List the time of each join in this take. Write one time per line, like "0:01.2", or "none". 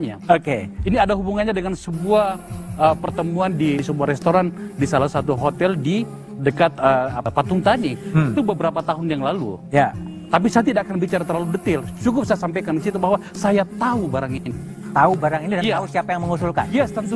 0:03.8
0:07.3